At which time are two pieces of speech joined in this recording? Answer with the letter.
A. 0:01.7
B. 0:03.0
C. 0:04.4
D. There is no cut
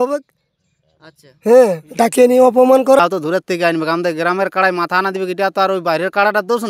B